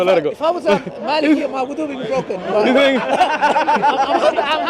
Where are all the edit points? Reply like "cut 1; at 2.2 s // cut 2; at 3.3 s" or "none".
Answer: none